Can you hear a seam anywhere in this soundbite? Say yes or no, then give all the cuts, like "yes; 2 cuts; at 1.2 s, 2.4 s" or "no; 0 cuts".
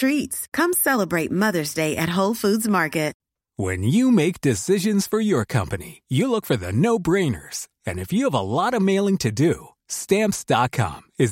no; 0 cuts